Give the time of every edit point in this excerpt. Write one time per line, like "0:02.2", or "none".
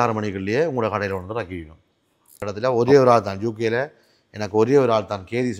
0:02.5